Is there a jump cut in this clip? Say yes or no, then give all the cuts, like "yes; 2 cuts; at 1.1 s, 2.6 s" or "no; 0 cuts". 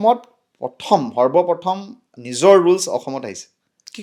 no; 0 cuts